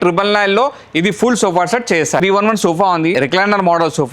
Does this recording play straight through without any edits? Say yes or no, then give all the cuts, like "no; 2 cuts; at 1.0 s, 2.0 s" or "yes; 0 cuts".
no; 2 cuts; at 2.2 s, 3.1 s